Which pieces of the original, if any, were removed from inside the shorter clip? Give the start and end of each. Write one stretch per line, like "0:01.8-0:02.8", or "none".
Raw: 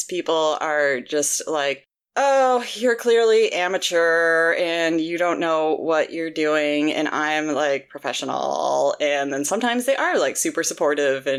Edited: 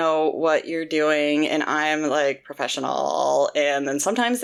none

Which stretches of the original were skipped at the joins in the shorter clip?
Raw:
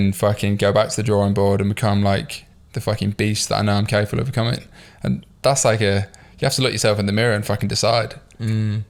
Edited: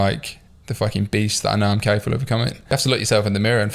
0:04.6-0:06.3

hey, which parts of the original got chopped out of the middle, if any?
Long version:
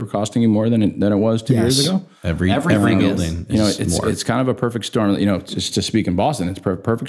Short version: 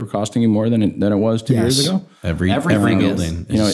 none

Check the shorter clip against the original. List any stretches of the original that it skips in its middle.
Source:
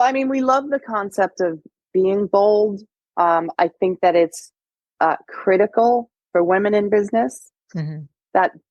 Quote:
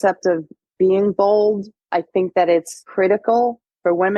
0:03.0-0:03.5
0:04.5-0:05.3

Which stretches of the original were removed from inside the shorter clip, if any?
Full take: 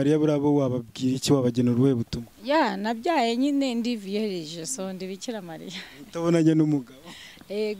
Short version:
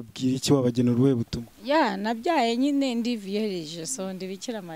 none

